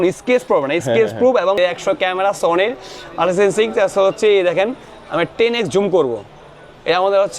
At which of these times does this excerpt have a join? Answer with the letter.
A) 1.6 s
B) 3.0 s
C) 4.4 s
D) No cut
A